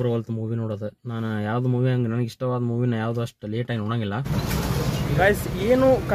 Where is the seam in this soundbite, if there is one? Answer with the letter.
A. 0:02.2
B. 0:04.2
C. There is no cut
B